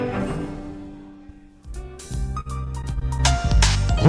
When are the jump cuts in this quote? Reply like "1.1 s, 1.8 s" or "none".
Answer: 1.8 s